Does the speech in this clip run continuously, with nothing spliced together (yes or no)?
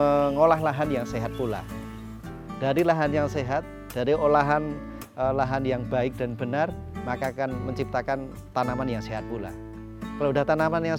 yes